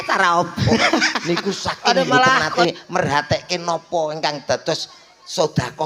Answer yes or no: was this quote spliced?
yes